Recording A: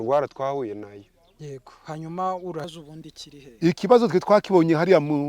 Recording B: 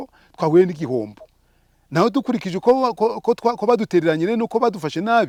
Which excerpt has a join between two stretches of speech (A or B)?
A